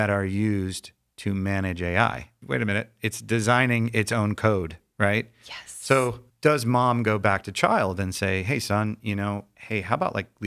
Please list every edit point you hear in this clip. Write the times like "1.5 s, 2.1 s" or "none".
2.3 s, 6.3 s, 9.5 s